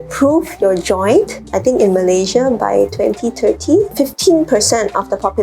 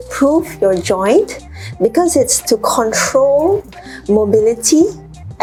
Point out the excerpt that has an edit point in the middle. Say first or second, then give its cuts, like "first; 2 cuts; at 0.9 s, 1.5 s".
first; 2 cuts; at 1.5 s, 3.9 s